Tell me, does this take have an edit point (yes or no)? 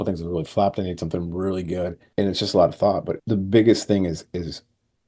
yes